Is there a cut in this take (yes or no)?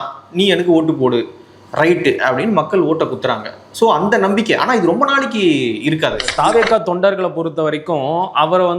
yes